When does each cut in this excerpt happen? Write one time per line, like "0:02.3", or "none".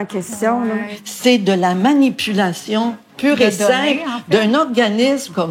0:00.9